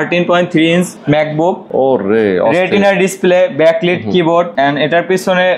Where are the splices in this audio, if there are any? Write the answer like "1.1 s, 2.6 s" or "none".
1.5 s, 4.5 s